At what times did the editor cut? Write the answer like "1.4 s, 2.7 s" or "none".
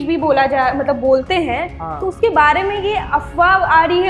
none

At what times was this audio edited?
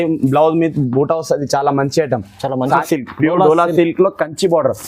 2.8 s

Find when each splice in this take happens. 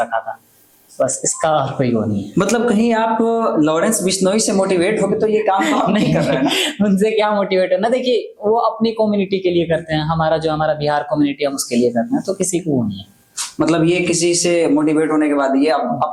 none

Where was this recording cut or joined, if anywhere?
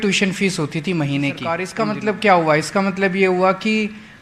1.7 s

